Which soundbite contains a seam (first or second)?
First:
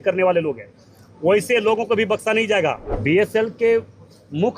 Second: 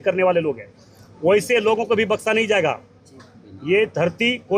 first